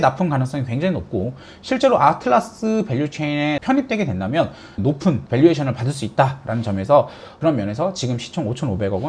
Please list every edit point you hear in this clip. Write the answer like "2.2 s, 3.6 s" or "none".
4.6 s, 7.2 s

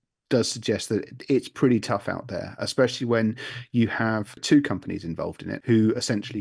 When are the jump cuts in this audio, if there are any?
4.4 s, 5.5 s

